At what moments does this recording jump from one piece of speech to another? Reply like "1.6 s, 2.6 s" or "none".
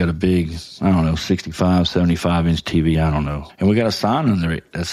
3.4 s